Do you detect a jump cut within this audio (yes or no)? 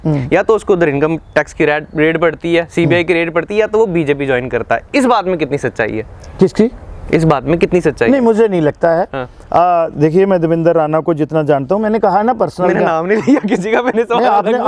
no